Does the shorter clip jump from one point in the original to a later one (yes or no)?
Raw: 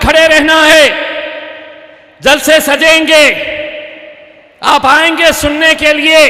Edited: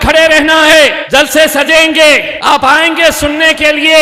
yes